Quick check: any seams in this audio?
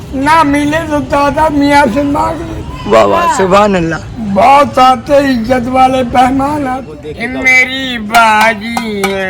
yes; 1 cut; at 7.0 s

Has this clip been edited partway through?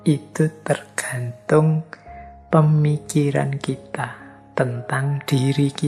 no; 0 cuts

